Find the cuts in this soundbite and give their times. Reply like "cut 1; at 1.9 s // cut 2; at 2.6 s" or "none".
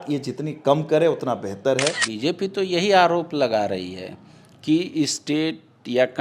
cut 1; at 2.0 s